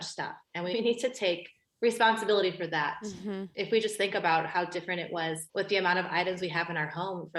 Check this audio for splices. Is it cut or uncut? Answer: uncut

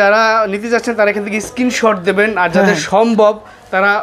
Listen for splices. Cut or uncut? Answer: uncut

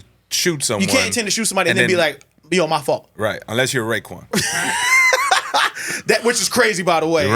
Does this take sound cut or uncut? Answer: cut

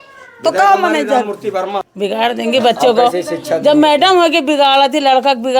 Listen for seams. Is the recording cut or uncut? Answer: cut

